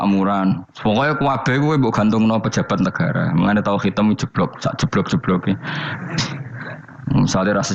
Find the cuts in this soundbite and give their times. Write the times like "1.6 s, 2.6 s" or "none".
6.9 s